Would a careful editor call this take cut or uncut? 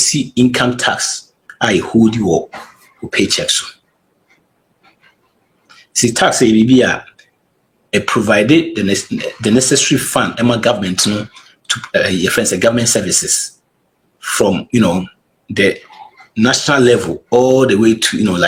uncut